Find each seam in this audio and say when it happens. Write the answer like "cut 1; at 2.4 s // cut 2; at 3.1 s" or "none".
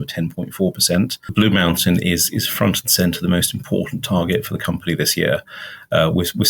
cut 1; at 1.3 s